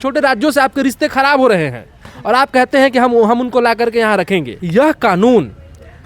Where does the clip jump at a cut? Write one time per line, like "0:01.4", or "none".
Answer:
0:04.6